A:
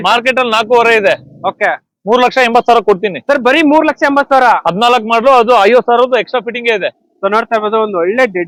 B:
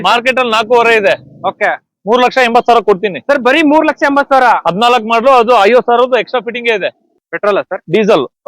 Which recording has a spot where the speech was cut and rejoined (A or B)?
B